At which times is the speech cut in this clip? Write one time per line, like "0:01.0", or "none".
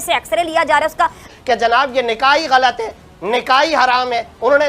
0:01.3